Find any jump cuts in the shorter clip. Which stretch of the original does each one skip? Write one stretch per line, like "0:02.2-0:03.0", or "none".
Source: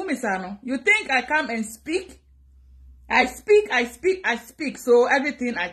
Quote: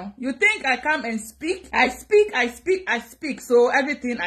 0:02.1-0:03.0